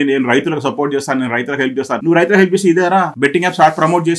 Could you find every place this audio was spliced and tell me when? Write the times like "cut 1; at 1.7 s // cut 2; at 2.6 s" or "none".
cut 1; at 2.0 s // cut 2; at 3.1 s